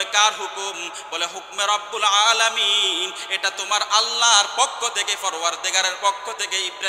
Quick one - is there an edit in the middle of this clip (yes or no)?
no